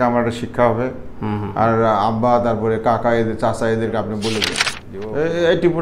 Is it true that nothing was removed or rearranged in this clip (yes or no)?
no